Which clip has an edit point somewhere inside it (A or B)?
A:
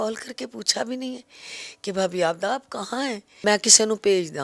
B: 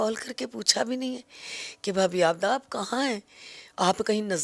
A